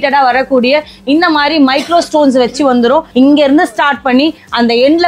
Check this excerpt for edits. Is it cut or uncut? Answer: cut